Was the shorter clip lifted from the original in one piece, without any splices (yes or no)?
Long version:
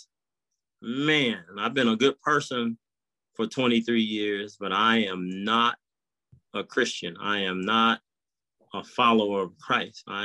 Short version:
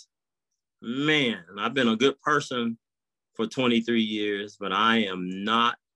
yes